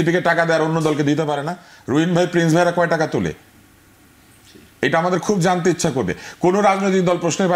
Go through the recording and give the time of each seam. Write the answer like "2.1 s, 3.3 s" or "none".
none

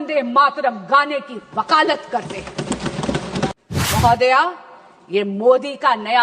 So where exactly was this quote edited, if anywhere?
3.5 s

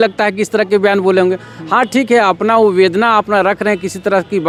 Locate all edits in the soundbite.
none

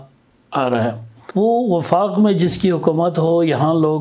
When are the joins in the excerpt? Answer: 1.1 s

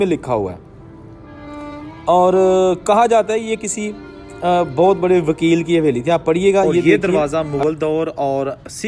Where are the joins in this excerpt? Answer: 6.9 s

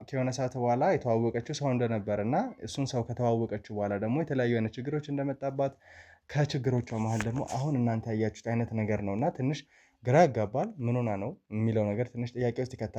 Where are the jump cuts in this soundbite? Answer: none

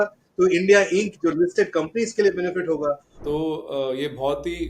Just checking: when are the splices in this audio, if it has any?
3.1 s

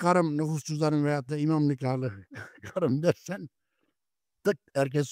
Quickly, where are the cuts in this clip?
none

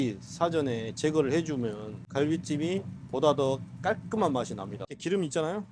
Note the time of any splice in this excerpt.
1.9 s, 4.9 s

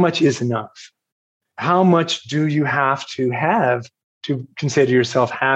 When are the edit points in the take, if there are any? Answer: 1.5 s

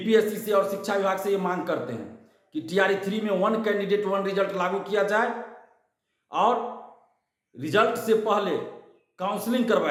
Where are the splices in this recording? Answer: none

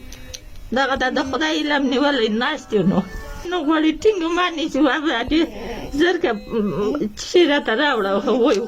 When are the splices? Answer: 3.4 s

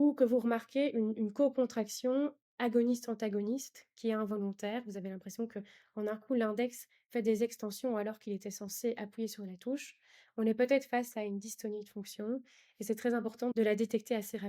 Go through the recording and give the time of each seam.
13.5 s

